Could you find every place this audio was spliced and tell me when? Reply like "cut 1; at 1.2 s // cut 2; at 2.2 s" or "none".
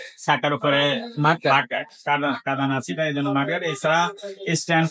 none